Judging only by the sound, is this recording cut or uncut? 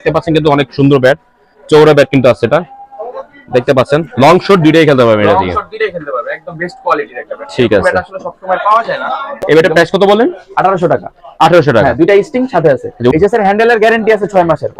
cut